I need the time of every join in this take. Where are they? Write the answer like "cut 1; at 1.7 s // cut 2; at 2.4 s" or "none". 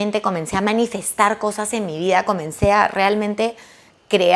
none